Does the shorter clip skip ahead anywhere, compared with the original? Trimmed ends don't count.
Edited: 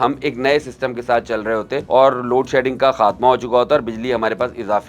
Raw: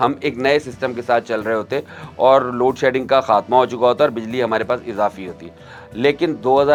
yes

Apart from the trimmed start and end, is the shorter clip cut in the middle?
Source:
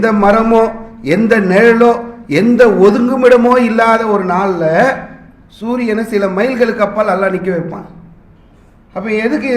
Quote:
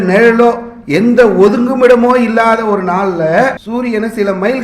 yes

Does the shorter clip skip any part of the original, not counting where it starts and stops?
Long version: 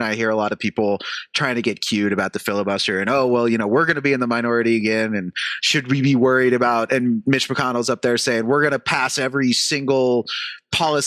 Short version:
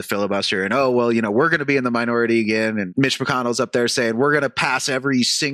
yes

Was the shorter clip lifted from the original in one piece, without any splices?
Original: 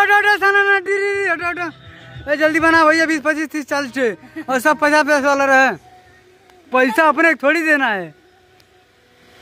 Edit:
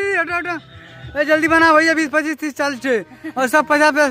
yes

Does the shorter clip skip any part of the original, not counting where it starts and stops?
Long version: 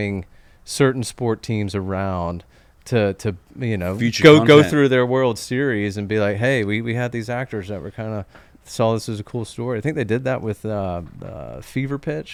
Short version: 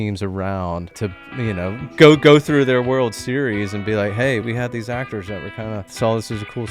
yes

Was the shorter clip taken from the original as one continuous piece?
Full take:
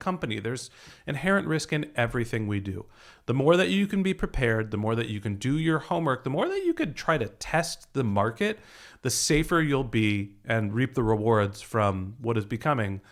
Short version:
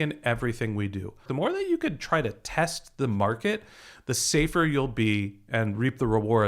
no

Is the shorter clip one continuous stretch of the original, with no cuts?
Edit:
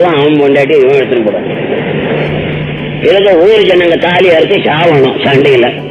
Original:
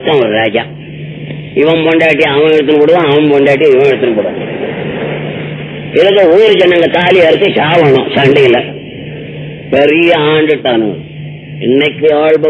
yes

